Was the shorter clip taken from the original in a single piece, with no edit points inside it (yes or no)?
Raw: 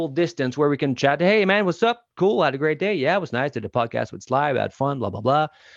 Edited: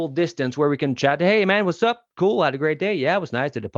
yes